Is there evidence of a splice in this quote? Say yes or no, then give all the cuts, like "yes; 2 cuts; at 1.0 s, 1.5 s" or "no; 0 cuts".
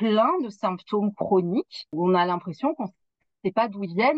yes; 1 cut; at 1.8 s